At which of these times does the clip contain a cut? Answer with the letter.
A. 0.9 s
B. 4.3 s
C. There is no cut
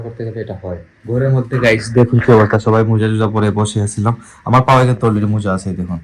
A